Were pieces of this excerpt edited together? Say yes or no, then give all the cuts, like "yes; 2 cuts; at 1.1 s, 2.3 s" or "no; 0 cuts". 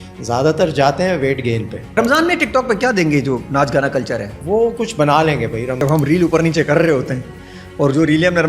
yes; 3 cuts; at 1.9 s, 4.3 s, 5.8 s